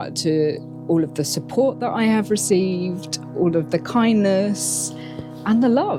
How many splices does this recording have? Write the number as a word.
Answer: zero